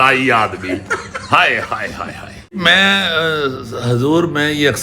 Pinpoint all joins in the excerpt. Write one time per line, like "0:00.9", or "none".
0:02.6